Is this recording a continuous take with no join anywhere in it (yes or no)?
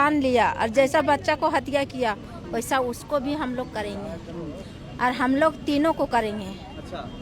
yes